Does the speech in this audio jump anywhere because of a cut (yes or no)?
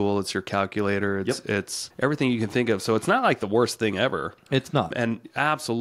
yes